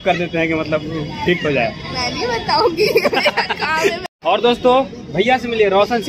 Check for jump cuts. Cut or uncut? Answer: cut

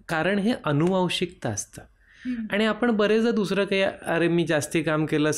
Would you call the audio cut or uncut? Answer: uncut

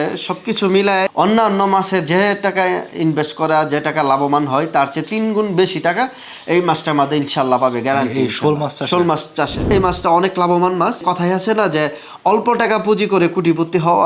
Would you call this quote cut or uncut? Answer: cut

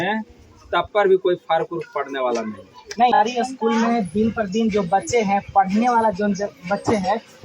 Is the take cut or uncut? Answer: cut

